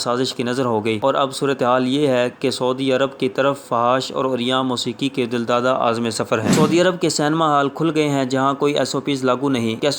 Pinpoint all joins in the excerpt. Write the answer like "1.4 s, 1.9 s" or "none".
6.5 s